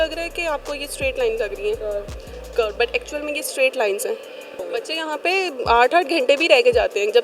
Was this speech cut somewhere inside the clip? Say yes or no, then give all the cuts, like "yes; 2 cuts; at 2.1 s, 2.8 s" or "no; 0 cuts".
yes; 1 cut; at 4.6 s